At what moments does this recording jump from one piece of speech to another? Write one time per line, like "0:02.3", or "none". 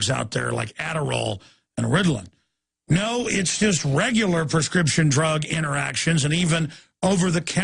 0:03.2